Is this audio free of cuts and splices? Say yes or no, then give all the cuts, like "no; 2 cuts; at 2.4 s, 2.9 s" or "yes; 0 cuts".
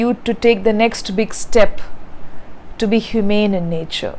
yes; 0 cuts